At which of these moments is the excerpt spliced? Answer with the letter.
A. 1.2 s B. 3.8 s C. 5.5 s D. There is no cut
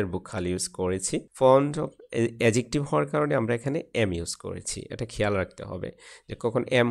A